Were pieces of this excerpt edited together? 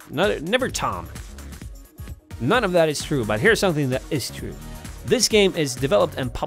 yes; 1 cut; at 3.0 s

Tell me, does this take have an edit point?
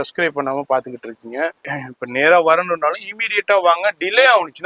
yes; 1 cut; at 1.7 s

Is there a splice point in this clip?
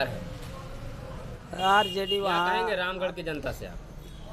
yes; 1 cut; at 2.6 s

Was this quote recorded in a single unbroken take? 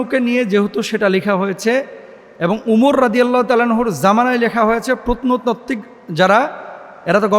yes; 0 cuts

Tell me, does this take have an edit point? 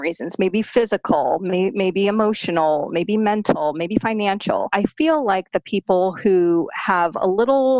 yes; 1 cut; at 4.7 s

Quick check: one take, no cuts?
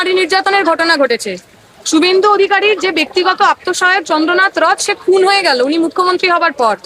yes; 0 cuts

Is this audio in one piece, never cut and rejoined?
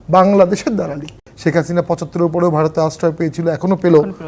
no; 1 cut; at 1.2 s

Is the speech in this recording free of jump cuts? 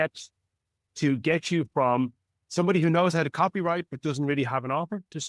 yes; 0 cuts

